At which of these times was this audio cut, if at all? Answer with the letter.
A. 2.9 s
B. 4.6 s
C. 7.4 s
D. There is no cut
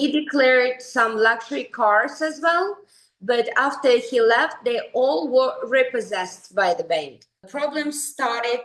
C